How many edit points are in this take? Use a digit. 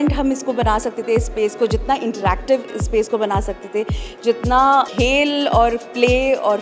1